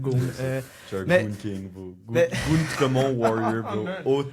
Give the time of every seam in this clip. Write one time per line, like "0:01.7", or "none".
none